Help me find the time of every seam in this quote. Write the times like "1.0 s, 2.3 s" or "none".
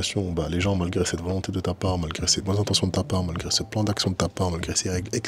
none